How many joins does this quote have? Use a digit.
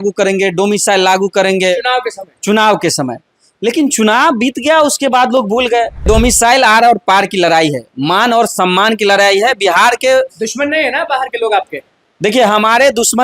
1